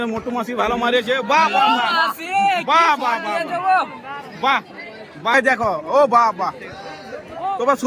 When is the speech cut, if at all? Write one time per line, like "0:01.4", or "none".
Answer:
0:05.3